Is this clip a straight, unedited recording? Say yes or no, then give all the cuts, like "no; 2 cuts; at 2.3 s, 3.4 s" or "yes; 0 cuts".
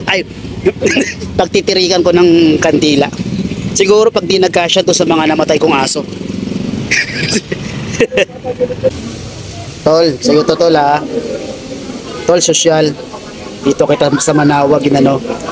no; 1 cut; at 9.0 s